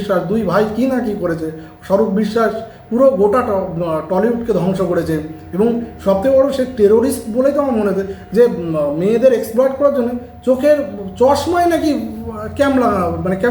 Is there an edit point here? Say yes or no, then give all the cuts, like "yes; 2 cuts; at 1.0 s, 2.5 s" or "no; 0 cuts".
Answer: no; 0 cuts